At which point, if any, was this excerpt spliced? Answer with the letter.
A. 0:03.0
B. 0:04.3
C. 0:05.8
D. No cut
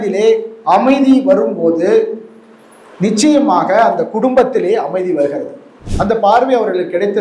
C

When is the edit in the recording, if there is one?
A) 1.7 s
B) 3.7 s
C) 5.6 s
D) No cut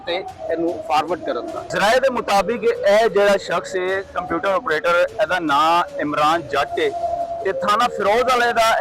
A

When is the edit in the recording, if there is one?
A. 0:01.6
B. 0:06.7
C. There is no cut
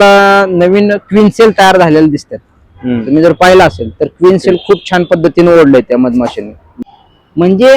B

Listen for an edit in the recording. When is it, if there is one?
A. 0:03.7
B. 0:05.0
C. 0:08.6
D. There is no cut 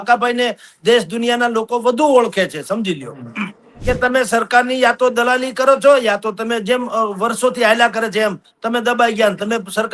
A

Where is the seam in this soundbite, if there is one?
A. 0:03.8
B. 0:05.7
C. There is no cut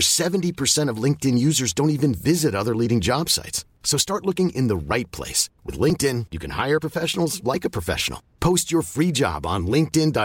C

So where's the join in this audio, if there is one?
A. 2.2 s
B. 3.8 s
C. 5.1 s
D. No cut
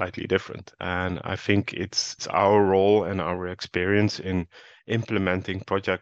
A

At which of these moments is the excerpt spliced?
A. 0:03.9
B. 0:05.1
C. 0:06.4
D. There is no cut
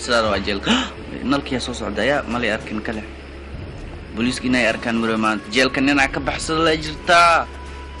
B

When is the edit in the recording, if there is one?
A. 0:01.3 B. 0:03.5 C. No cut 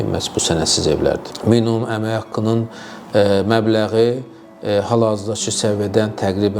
A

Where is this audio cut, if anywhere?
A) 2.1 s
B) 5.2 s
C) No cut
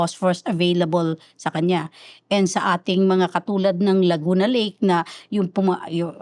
C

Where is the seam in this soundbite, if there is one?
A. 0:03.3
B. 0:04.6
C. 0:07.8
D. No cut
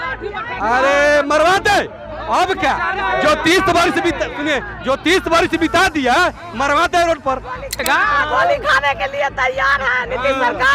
C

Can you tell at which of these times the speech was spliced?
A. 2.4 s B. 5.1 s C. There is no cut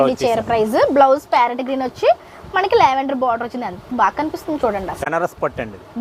B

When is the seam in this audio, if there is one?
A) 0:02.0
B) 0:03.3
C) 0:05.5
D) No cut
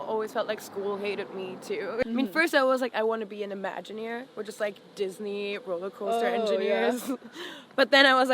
A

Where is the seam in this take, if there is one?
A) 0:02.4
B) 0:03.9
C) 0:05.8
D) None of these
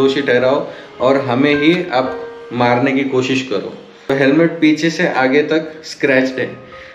B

